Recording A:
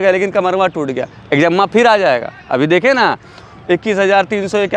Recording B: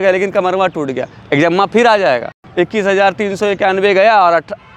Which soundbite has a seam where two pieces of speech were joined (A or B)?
B